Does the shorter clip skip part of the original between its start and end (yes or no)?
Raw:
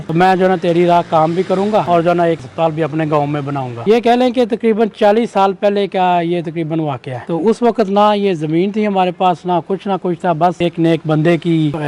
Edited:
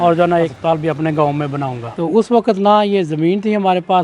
yes